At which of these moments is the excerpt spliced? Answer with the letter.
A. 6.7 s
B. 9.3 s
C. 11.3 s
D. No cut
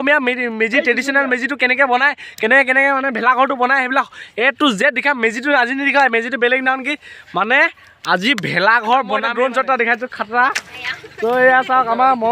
B